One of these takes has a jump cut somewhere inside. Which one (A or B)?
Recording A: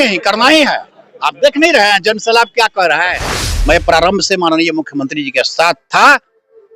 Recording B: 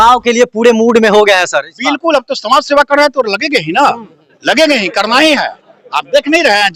A